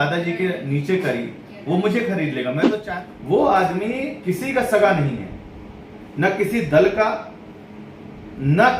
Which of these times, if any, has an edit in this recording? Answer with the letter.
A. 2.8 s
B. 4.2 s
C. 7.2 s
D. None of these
A